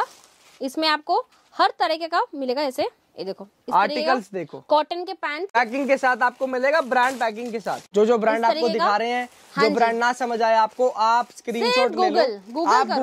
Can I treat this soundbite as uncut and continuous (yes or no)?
no